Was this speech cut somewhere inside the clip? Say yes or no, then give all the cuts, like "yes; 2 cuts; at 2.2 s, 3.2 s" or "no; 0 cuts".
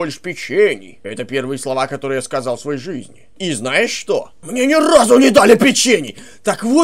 yes; 3 cuts; at 1.0 s, 3.3 s, 4.4 s